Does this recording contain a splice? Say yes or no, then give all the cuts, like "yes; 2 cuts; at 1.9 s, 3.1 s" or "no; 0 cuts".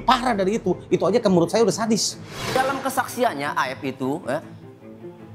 yes; 1 cut; at 2.3 s